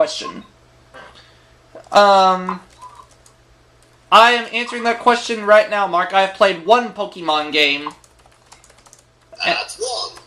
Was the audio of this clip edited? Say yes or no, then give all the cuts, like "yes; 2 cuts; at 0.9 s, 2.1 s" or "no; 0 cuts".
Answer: yes; 1 cut; at 1.8 s